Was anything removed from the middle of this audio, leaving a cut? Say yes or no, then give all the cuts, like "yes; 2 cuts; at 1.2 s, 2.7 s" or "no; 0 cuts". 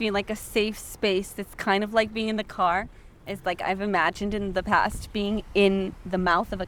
no; 0 cuts